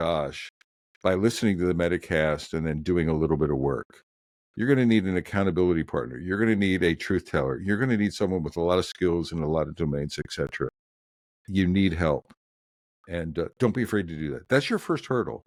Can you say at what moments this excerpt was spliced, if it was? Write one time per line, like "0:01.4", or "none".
none